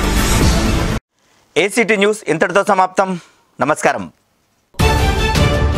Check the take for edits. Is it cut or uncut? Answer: uncut